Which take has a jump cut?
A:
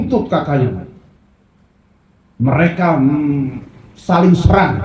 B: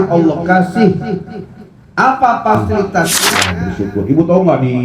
B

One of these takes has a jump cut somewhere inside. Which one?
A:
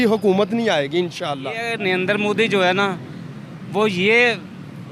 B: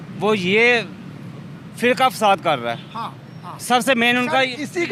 A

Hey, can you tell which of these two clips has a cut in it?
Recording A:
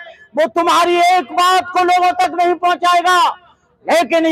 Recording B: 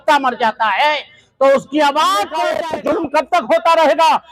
B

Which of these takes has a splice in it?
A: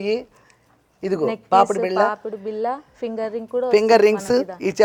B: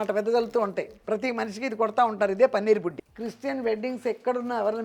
B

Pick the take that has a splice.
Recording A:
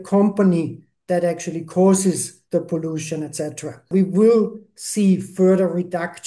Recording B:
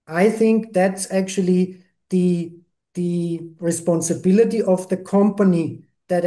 A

